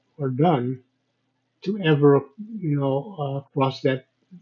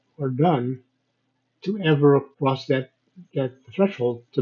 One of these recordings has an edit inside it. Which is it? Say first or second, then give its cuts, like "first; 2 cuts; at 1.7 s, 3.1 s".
second; 1 cut; at 2.3 s